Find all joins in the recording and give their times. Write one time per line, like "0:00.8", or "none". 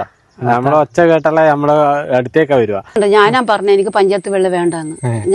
0:02.9